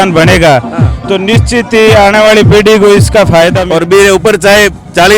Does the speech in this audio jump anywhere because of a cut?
yes; 1 cut; at 3.6 s

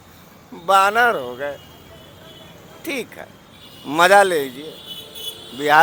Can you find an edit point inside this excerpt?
no; 0 cuts

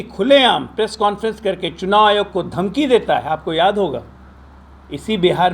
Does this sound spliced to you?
no; 0 cuts

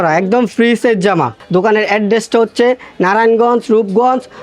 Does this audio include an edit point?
yes; 1 cut; at 1.4 s

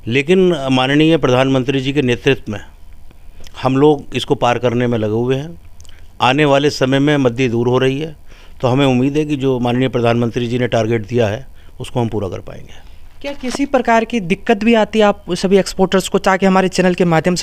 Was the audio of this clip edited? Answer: no; 0 cuts

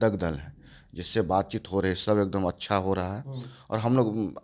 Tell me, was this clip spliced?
no; 0 cuts

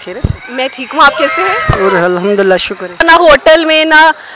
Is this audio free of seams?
no; 1 cut; at 3.0 s

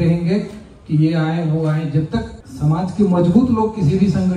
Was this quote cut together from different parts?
yes; 1 cut; at 2.4 s

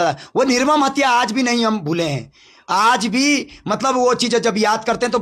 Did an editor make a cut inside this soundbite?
no; 0 cuts

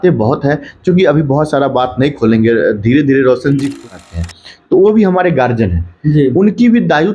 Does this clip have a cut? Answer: yes; 1 cut; at 3.8 s

